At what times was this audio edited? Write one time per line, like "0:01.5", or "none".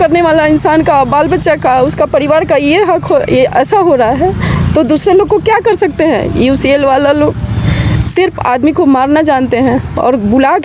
none